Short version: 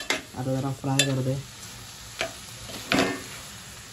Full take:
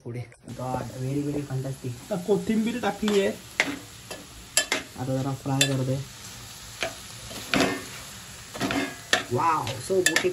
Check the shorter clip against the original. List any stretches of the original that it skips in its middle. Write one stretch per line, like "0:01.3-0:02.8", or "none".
none